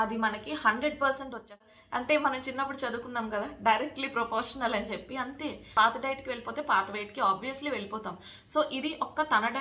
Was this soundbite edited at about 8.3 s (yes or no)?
no